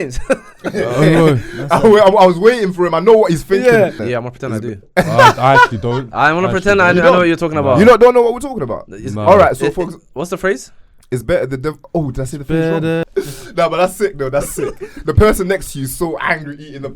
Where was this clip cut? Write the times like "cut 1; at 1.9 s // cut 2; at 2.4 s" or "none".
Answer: cut 1; at 4.0 s // cut 2; at 13.0 s